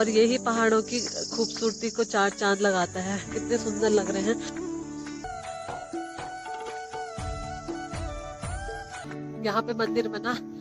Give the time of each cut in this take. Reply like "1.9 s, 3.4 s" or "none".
5.2 s, 9.0 s